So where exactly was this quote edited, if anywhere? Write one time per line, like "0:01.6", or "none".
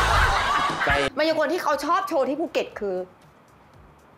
0:01.1